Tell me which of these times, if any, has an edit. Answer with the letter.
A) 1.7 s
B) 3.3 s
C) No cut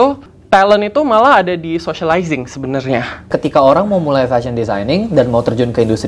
B